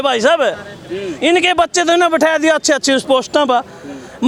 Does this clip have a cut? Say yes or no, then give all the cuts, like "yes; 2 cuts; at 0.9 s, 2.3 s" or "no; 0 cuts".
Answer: no; 0 cuts